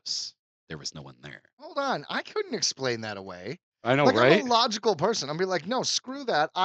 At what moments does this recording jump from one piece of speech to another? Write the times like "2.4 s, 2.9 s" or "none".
1.7 s

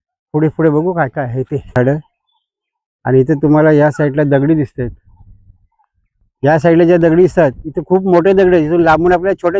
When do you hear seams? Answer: 1.7 s

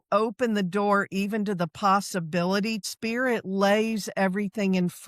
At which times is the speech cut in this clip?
2.8 s

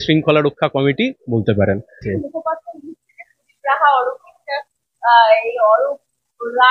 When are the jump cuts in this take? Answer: none

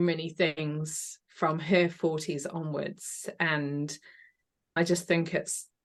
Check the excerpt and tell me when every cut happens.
none

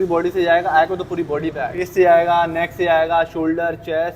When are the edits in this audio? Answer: 1.9 s

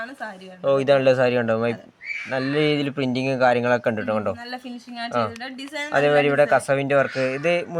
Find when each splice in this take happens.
none

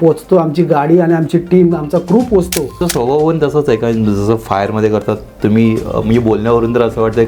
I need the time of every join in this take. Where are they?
2.8 s

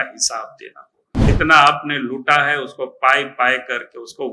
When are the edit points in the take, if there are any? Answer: 1.3 s

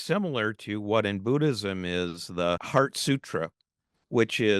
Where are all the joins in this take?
2.6 s

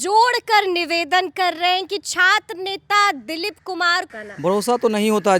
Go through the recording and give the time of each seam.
4.1 s

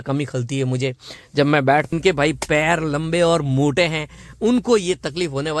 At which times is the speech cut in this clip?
1.9 s

